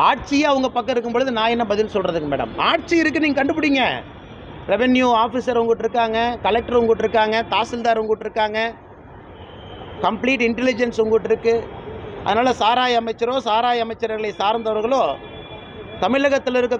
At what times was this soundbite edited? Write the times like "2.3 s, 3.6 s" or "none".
none